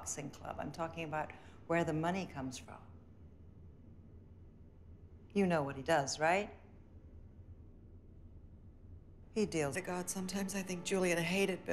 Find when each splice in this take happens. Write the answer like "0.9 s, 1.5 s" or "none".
none